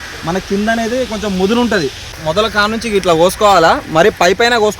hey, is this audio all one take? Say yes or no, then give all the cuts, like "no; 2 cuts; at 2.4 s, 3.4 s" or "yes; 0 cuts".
no; 1 cut; at 2.1 s